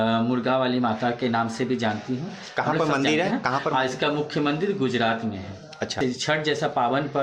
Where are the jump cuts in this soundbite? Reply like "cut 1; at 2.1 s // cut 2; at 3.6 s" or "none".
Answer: cut 1; at 5.9 s